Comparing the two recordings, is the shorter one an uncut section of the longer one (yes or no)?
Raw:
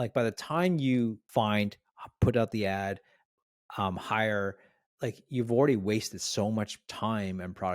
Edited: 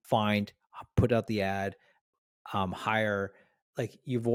yes